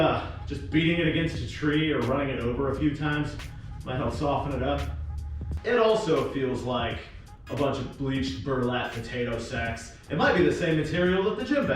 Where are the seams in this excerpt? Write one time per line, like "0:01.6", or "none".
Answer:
0:05.5